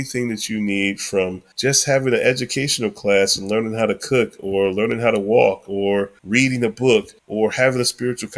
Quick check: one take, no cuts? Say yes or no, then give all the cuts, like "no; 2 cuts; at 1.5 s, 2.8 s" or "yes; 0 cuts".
no; 3 cuts; at 1.4 s, 6.2 s, 7.2 s